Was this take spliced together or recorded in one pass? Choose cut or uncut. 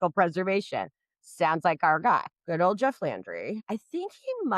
cut